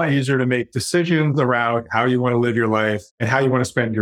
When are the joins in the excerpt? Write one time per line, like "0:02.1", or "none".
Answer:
0:03.1